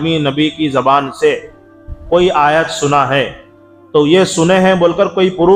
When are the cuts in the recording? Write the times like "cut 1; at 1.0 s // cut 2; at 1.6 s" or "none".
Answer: none